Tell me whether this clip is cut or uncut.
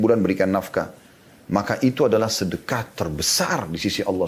uncut